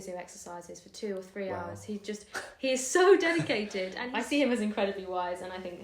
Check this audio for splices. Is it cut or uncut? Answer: cut